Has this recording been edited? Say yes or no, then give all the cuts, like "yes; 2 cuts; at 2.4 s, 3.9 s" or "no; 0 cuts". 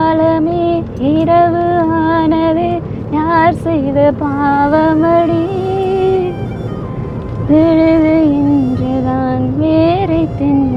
no; 0 cuts